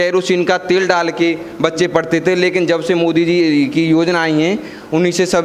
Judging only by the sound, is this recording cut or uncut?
uncut